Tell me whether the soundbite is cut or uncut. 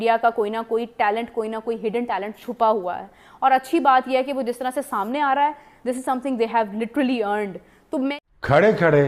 cut